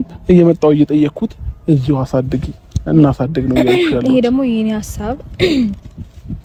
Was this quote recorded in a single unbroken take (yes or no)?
yes